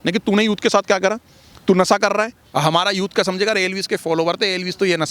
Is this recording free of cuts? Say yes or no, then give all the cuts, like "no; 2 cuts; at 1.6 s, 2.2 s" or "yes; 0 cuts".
no; 1 cut; at 2.4 s